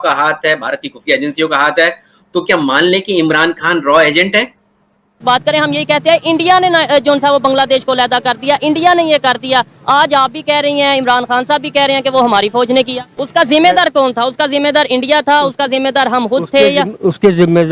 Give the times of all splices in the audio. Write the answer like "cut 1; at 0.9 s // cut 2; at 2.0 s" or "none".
cut 1; at 5.2 s